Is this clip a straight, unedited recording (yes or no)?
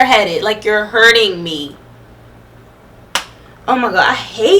yes